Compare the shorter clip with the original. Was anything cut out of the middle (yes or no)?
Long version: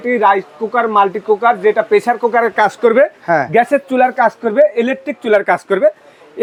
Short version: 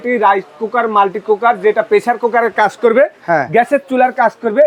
no